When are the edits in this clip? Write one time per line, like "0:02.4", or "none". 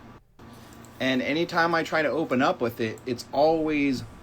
0:02.4